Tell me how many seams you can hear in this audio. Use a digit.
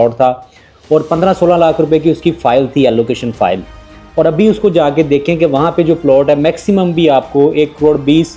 0